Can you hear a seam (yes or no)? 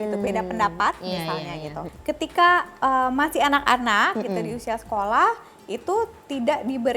yes